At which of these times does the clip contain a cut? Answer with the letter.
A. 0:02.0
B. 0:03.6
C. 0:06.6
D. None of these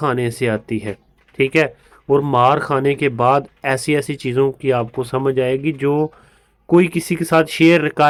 D